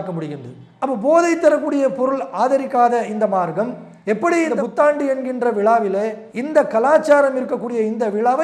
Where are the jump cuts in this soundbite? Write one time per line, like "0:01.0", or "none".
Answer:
none